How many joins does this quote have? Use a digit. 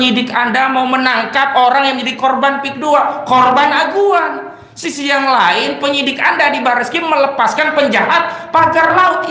0